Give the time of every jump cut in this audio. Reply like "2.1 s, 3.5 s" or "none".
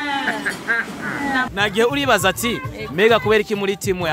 1.5 s